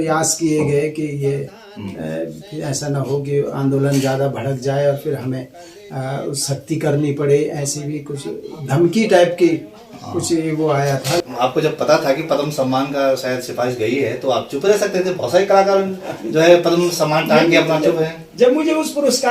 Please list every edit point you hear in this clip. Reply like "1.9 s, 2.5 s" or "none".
11.2 s